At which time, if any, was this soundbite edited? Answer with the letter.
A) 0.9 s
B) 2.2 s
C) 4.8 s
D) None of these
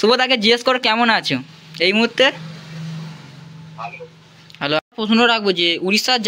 C